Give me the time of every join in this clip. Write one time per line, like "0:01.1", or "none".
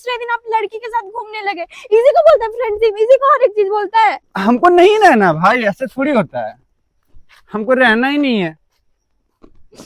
0:04.3

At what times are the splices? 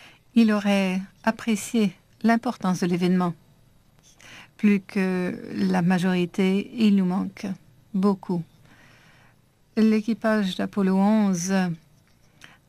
0:08.5

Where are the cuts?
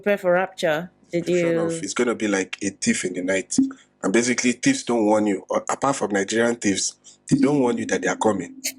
0:01.8

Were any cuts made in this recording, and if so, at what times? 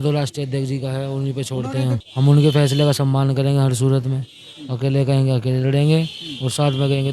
0:02.0

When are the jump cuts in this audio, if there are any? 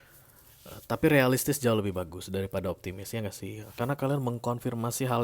0:03.6

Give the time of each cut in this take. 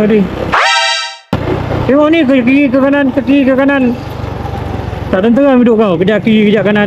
none

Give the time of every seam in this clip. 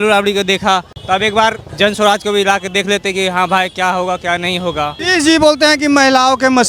0:00.9
0:01.7
0:05.0

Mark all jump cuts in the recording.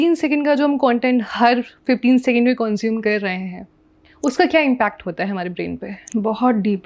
0:05.9

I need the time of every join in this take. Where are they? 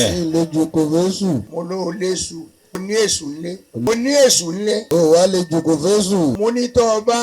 0:01.5
0:02.8
0:03.9
0:04.8
0:06.4

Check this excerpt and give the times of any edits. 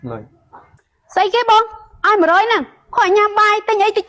none

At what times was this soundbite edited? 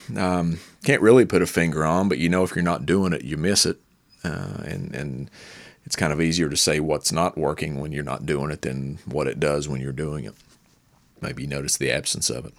0:11.2

